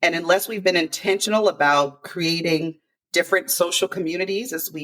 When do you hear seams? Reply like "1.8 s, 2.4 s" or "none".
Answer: none